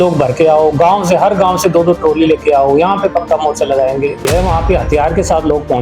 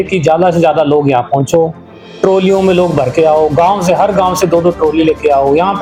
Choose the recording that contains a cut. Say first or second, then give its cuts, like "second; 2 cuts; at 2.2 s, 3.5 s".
first; 1 cut; at 4.2 s